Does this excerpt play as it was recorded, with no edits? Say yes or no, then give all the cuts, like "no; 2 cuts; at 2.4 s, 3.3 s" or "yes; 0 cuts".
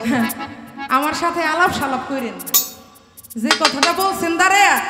yes; 0 cuts